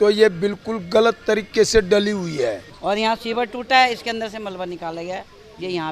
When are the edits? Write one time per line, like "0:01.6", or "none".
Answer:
0:02.7